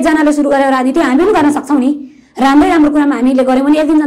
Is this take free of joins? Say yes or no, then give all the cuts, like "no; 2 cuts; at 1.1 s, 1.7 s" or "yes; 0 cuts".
yes; 0 cuts